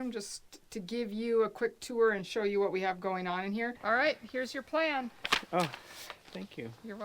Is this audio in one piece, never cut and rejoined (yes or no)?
no